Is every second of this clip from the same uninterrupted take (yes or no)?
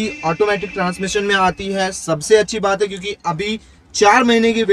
yes